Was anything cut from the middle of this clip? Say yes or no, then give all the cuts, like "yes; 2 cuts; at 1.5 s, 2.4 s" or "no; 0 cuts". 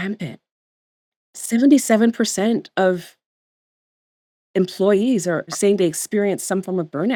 no; 0 cuts